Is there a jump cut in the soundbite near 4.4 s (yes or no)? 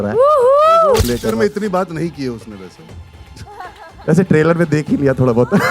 no